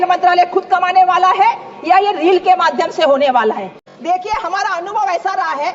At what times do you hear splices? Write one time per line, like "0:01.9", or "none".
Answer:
0:03.7